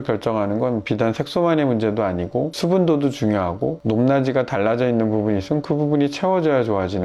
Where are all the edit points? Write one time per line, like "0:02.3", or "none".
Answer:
none